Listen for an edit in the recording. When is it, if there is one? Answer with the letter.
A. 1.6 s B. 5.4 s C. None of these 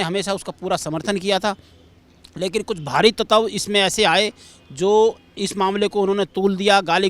C